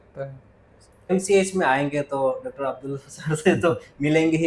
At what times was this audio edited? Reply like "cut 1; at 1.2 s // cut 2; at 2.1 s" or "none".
cut 1; at 1.1 s